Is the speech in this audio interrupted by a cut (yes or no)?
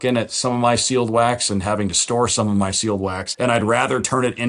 yes